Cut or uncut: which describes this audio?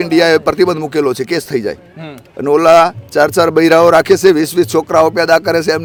uncut